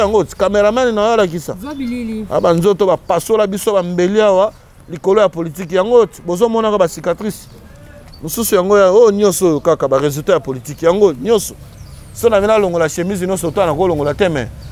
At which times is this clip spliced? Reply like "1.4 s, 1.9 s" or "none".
none